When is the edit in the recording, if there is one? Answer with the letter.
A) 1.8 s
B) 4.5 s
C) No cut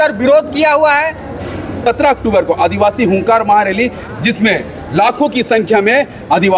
A